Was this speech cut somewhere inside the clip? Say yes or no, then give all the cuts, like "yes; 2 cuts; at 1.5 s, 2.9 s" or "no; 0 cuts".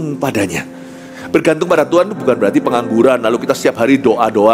no; 0 cuts